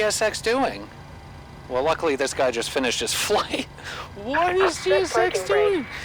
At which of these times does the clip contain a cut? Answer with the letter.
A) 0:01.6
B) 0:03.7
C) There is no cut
A